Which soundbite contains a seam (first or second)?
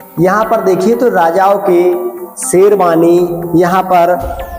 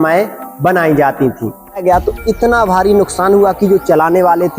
second